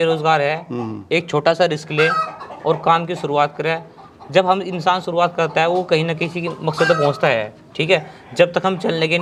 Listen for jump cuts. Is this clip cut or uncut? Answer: uncut